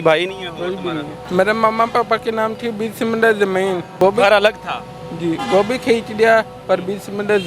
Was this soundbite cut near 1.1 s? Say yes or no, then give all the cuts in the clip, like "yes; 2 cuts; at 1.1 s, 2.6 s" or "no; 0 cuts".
yes; 2 cuts; at 1.1 s, 3.9 s